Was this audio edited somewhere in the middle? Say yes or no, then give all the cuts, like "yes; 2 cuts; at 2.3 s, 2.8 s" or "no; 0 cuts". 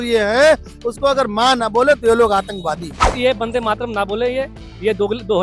yes; 1 cut; at 3.1 s